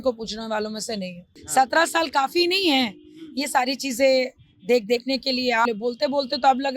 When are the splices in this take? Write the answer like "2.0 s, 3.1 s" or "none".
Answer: 1.3 s, 5.7 s